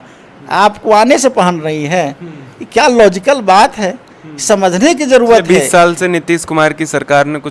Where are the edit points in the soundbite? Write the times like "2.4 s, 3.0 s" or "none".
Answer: 5.4 s